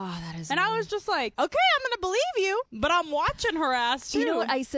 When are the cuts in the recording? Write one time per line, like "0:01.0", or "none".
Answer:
0:01.3
0:02.7